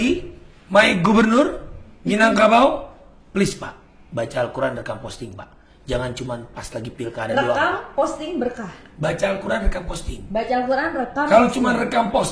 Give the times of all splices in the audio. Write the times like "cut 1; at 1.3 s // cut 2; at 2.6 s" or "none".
none